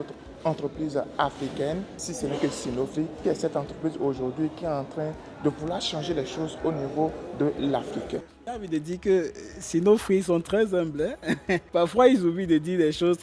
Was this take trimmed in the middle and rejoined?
yes; 3 cuts; at 2.0 s, 3.2 s, 8.3 s

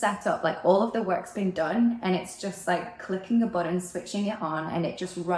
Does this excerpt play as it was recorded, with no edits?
yes; 0 cuts

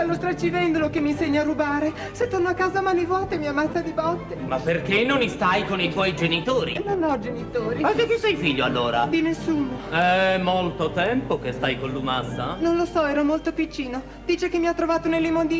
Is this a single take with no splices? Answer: yes; 0 cuts

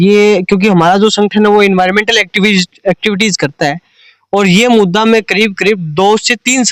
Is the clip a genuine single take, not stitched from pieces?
yes; 0 cuts

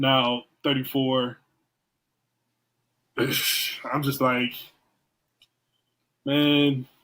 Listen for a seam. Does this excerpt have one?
no; 0 cuts

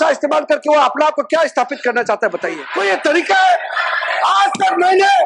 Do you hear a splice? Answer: yes; 1 cut; at 2.7 s

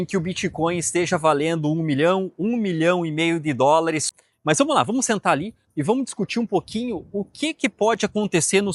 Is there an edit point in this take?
yes; 1 cut; at 4.1 s

